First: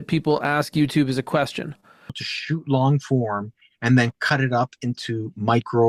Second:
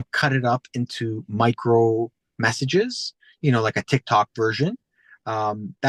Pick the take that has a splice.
first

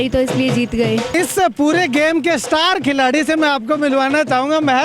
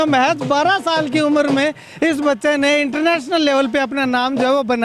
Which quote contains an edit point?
first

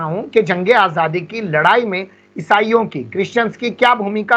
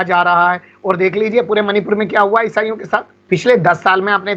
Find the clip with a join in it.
second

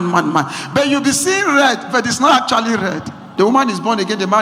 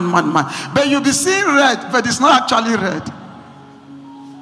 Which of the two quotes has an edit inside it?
first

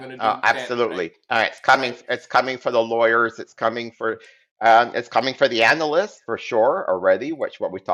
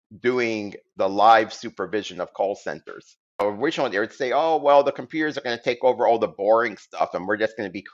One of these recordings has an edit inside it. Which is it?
second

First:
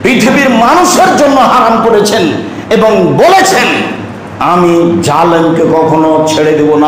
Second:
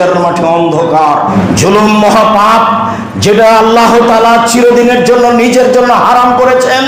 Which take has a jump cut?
second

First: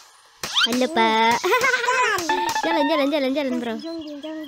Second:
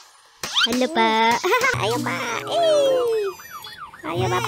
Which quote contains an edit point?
second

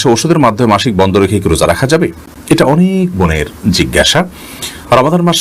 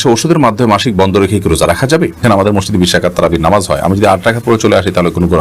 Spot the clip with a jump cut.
second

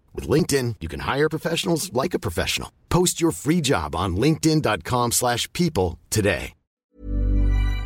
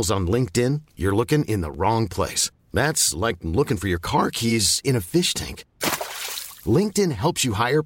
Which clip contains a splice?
first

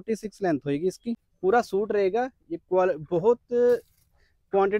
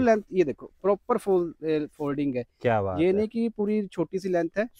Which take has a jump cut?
first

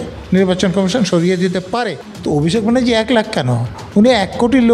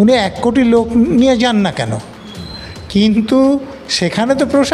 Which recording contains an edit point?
first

